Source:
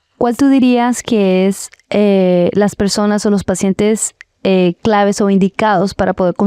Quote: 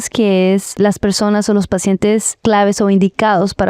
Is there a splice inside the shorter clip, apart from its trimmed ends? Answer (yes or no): yes